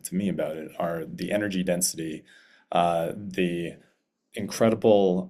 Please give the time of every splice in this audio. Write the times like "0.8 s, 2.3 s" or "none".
none